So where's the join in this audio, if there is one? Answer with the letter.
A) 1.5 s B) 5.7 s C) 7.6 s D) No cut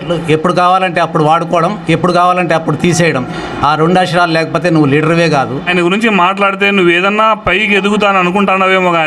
B